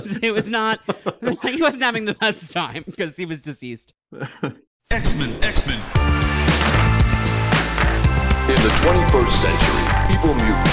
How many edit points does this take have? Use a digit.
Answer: 1